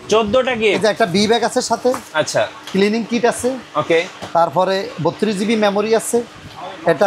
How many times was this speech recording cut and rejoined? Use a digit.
0